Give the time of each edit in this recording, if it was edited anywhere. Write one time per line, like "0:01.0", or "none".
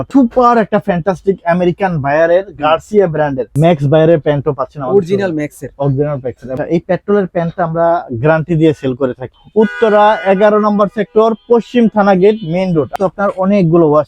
0:03.5
0:06.5
0:09.3
0:12.9